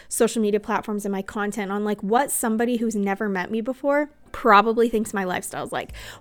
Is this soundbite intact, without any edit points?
no; 1 cut; at 4.2 s

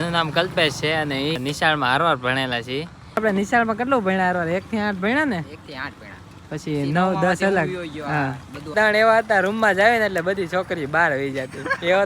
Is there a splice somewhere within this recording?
yes; 3 cuts; at 1.4 s, 3.2 s, 8.7 s

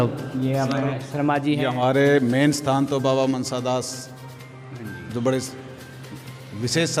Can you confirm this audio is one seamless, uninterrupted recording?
no; 1 cut; at 1.6 s

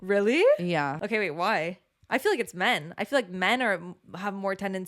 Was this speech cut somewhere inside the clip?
yes; 1 cut; at 1.0 s

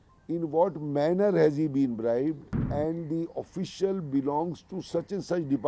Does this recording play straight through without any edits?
no; 1 cut; at 2.5 s

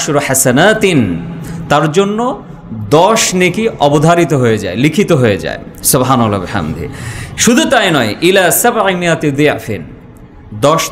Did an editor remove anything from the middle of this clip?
no; 0 cuts

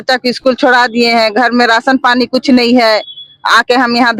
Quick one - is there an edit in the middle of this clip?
no; 0 cuts

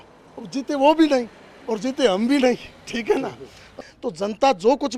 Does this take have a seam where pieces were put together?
yes; 1 cut; at 3.8 s

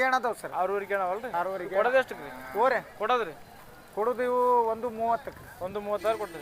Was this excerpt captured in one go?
yes; 0 cuts

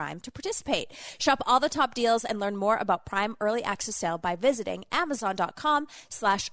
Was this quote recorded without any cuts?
yes; 0 cuts

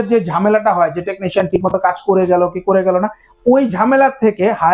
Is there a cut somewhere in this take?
no; 0 cuts

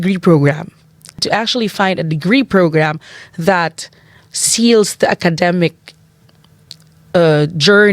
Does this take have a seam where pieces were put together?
yes; 1 cut; at 1.2 s

